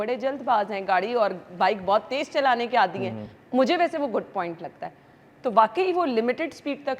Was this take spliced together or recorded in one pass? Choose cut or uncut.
uncut